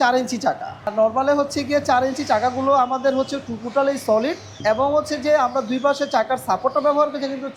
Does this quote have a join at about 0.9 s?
yes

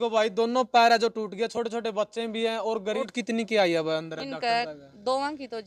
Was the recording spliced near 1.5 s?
no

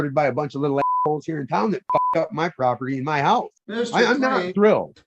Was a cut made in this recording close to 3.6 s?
yes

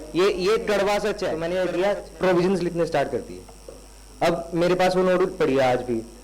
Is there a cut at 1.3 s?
yes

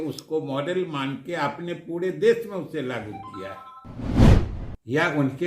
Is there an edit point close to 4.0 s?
yes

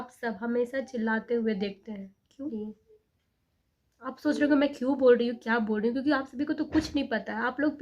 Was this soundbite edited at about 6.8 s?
no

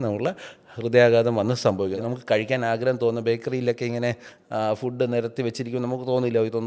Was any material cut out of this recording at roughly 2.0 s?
yes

